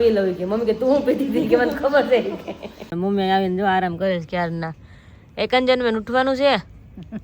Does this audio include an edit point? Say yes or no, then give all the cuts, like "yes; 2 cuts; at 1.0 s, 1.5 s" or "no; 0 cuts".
yes; 1 cut; at 2.9 s